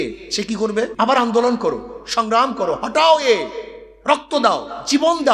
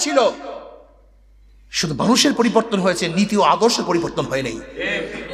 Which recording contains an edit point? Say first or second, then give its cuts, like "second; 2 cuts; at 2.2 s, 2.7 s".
first; 1 cut; at 0.9 s